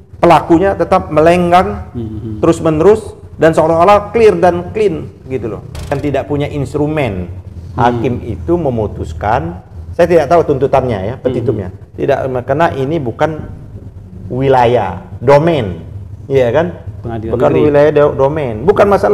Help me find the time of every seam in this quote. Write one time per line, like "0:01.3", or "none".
0:05.9